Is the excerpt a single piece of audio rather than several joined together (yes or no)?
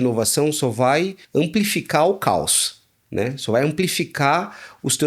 no